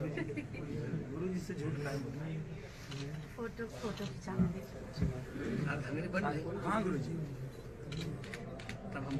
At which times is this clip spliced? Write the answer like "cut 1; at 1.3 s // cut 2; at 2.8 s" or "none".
none